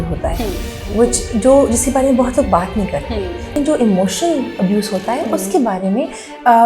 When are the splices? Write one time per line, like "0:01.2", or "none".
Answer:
0:03.5